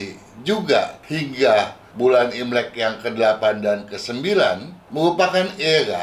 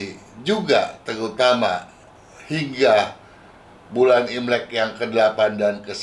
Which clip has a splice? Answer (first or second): first